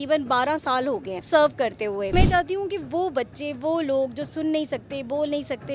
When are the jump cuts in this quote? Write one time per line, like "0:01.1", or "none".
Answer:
0:01.1
0:02.1